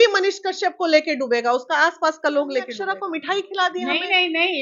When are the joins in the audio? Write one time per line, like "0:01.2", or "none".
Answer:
0:02.8